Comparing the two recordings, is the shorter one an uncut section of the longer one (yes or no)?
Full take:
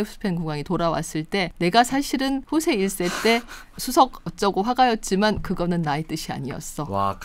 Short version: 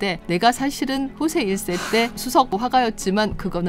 no